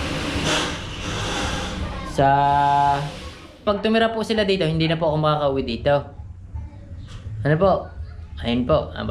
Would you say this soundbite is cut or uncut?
cut